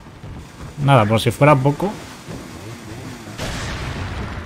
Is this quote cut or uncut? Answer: uncut